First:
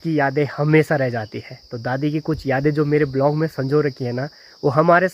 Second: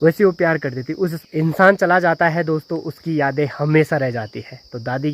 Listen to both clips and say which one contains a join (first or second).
second